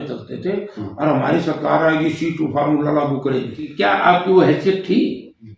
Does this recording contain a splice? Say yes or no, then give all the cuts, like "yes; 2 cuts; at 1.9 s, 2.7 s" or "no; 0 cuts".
yes; 1 cut; at 3.6 s